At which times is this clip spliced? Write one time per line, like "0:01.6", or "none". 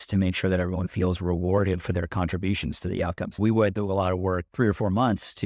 0:03.4
0:04.5